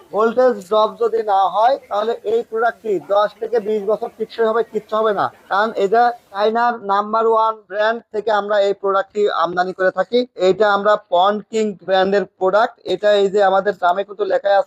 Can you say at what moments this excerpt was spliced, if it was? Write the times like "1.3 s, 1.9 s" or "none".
none